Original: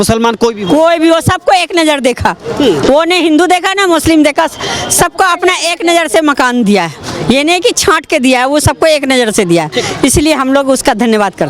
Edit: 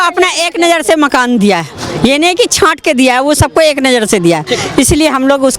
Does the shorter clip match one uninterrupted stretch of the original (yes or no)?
yes